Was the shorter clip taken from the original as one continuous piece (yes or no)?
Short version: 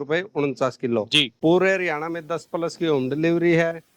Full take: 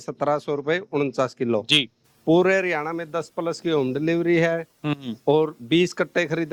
no